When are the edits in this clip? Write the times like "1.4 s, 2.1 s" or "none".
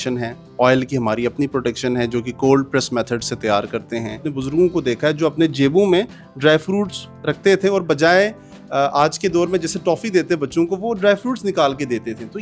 4.3 s